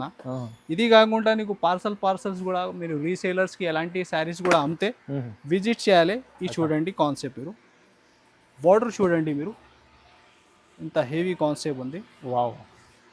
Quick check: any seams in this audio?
no; 0 cuts

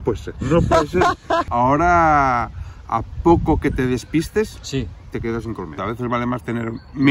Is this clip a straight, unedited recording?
no; 2 cuts; at 1.5 s, 5.8 s

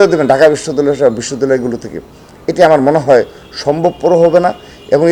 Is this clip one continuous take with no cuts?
yes; 0 cuts

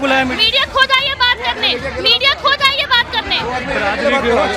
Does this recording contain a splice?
no; 0 cuts

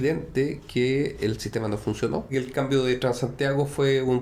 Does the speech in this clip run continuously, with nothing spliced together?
no; 1 cut; at 2.3 s

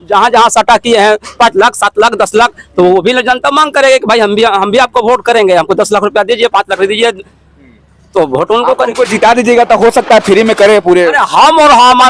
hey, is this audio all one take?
yes; 0 cuts

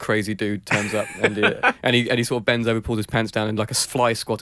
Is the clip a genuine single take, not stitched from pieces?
yes; 0 cuts

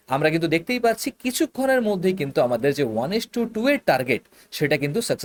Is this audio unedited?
yes; 0 cuts

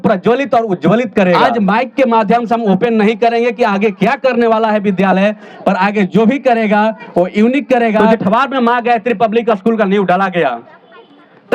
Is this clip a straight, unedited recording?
no; 2 cuts; at 1.4 s, 8.1 s

